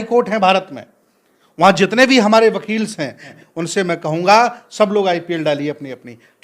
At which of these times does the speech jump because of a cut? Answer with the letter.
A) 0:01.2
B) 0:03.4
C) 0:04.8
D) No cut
B